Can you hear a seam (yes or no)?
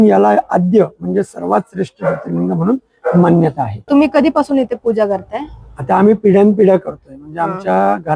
yes